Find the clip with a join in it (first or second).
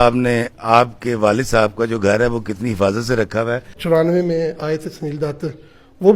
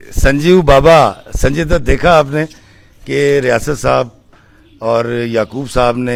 first